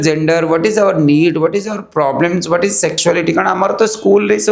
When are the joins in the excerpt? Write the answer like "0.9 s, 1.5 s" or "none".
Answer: none